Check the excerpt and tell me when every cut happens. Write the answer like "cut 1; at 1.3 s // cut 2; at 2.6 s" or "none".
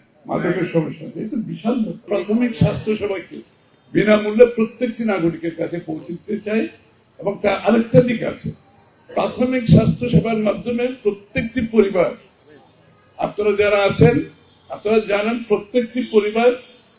cut 1; at 2.0 s